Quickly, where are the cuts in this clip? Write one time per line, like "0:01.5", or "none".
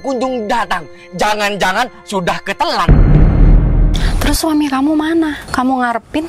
0:02.8
0:03.9
0:05.4